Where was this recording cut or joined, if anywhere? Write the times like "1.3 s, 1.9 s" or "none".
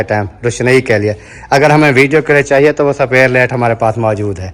none